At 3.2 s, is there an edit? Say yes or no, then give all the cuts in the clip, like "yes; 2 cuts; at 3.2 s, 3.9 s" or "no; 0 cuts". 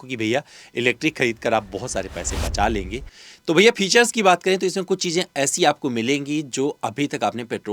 yes; 1 cut; at 3.2 s